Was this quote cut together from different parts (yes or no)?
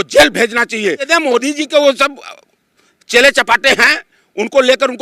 yes